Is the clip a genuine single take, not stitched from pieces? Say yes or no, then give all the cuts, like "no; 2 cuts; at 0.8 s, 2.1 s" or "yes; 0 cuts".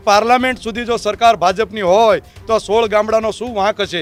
yes; 0 cuts